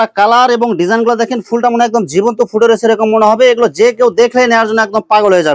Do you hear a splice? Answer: no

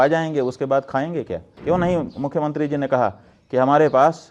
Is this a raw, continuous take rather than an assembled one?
no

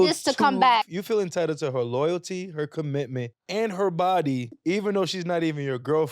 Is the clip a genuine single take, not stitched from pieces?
no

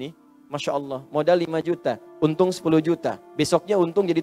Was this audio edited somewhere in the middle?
yes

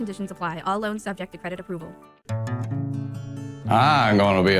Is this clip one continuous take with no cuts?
no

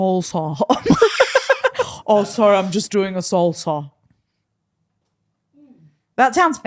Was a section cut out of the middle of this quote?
no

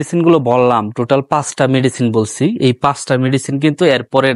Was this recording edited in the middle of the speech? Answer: no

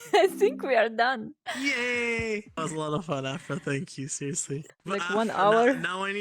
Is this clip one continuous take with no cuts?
no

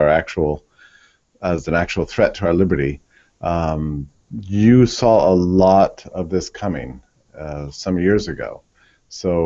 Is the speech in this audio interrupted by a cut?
no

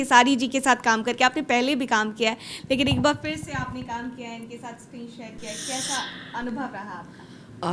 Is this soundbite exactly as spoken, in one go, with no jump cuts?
yes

